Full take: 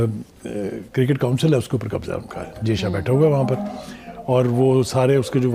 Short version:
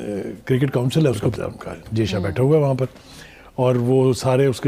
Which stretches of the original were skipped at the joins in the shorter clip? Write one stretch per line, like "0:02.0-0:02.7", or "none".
0:01.8-0:02.0